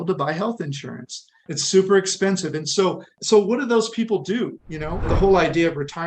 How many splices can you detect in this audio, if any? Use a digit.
3